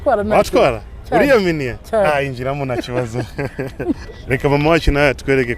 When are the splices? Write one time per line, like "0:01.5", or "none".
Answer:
0:04.1